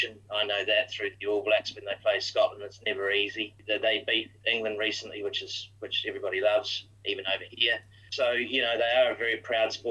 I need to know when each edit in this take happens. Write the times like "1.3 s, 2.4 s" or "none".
3.5 s, 6.8 s, 8.1 s